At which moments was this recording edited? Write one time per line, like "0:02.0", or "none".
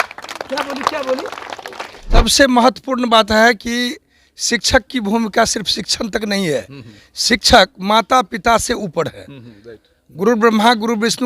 0:02.2